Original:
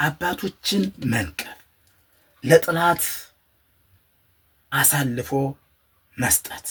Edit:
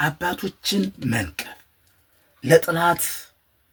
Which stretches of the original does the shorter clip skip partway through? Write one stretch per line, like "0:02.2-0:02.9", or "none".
none

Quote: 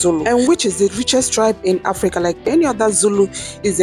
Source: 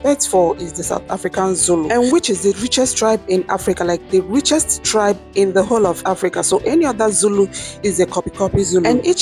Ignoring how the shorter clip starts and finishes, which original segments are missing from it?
0:04.1-0:06.6

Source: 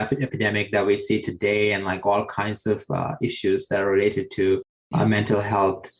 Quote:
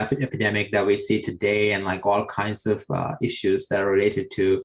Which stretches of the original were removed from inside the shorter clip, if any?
none

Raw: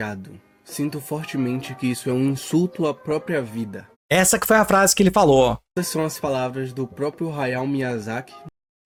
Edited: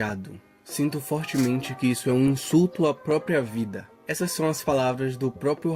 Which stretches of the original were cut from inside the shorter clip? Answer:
0:04.0-0:05.6

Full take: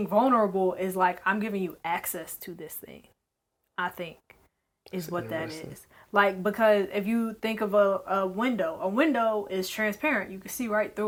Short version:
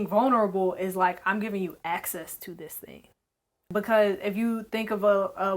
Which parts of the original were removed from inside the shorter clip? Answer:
0:03.7-0:06.4

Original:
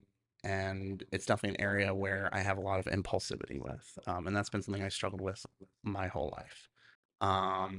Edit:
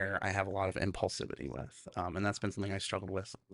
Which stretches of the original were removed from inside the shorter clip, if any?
none

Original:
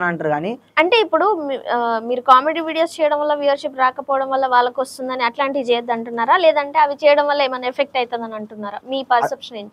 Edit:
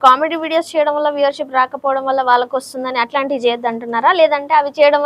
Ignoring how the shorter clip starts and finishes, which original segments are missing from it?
none

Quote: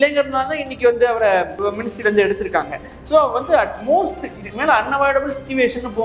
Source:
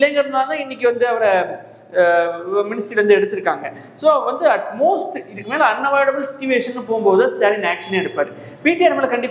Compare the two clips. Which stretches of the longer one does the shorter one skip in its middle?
0:01.5-0:02.4

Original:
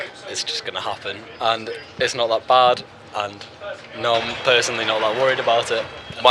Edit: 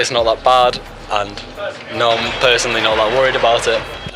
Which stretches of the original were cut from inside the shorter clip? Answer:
none

